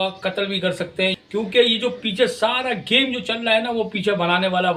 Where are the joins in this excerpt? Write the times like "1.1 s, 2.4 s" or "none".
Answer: 1.2 s